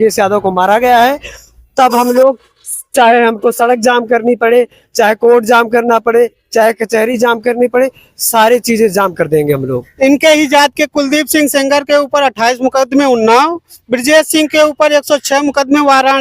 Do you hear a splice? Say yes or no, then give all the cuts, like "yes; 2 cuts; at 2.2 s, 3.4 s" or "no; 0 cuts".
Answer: yes; 1 cut; at 9.8 s